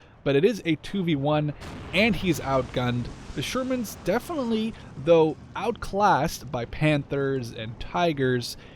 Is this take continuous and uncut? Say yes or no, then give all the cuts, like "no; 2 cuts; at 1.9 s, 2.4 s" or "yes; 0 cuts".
no; 1 cut; at 3.3 s